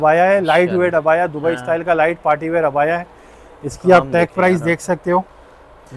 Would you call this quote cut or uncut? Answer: uncut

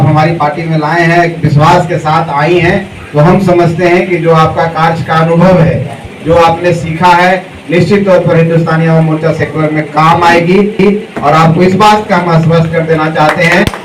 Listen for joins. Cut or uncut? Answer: uncut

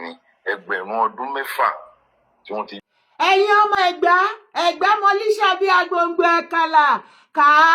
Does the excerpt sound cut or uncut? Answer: cut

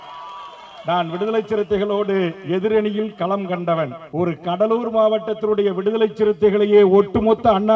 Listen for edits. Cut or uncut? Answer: cut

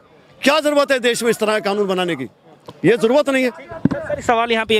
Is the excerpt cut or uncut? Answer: uncut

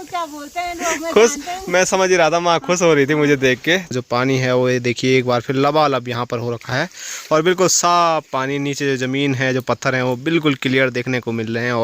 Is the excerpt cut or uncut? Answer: cut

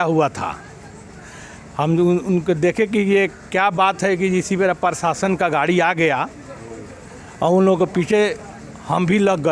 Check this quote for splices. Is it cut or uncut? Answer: uncut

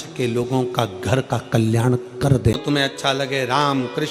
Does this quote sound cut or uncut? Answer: cut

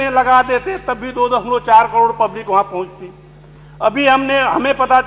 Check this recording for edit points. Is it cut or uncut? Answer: uncut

